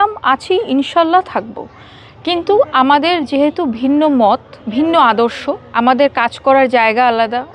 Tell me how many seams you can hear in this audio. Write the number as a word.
zero